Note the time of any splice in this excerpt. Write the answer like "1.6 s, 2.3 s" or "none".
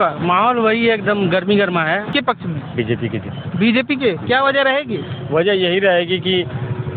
2.1 s